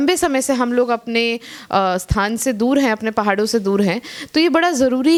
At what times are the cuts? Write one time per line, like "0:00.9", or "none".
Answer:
none